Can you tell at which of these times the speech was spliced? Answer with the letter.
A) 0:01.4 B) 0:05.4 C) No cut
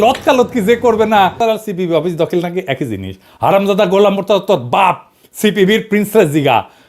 A